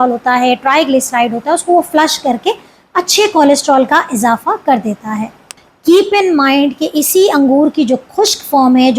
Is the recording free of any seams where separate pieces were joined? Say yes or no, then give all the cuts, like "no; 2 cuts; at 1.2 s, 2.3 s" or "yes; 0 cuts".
no; 1 cut; at 5.4 s